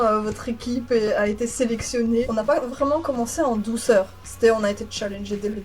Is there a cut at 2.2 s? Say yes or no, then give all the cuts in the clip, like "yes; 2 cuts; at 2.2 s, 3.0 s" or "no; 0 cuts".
yes; 1 cut; at 2.2 s